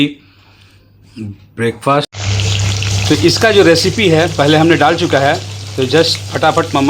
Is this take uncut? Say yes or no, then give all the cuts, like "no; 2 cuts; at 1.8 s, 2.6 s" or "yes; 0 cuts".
no; 1 cut; at 2.2 s